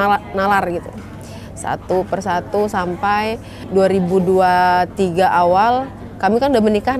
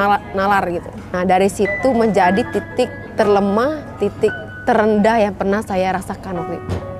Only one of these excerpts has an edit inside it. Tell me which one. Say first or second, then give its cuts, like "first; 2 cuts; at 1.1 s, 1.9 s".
second; 2 cuts; at 1.1 s, 3.0 s